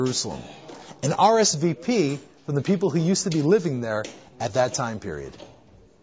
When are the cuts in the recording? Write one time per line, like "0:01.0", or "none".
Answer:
none